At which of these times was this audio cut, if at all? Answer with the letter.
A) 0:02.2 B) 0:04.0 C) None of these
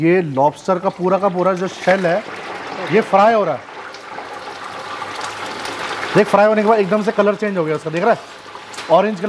C